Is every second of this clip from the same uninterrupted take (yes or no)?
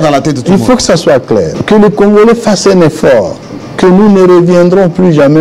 no